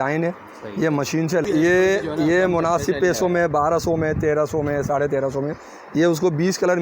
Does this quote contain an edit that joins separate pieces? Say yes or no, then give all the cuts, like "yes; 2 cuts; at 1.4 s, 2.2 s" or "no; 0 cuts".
yes; 1 cut; at 1.4 s